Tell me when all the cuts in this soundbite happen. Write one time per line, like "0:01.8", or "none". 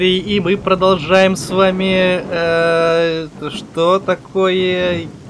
none

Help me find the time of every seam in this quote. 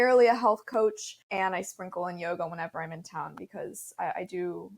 0:01.2

